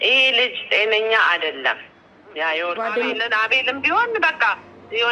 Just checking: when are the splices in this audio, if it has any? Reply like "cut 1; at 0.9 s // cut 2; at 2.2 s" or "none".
cut 1; at 2.7 s